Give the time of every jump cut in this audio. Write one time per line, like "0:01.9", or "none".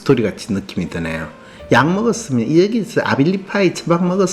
none